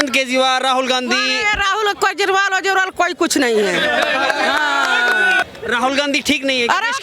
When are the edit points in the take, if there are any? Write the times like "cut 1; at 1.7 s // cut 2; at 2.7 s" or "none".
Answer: cut 1; at 5.4 s